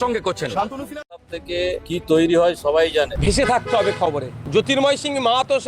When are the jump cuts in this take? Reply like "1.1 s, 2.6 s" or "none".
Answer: 1.3 s, 4.7 s